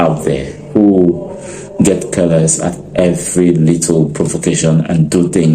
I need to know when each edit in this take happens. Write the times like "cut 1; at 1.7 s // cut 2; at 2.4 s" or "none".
none